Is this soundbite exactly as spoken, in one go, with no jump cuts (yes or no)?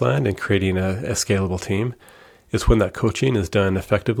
yes